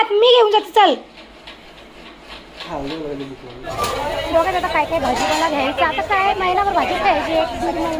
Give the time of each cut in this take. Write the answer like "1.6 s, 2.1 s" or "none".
3.7 s